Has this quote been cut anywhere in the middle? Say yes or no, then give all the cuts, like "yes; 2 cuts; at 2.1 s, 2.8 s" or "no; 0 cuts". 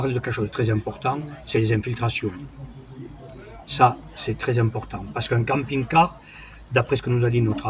no; 0 cuts